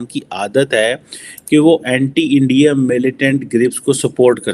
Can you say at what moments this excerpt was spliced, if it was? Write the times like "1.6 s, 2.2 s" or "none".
none